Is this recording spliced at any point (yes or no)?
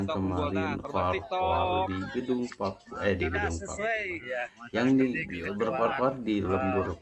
no